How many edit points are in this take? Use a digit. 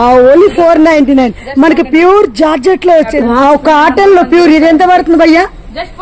1